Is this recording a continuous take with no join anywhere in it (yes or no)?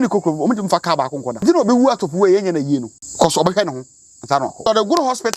no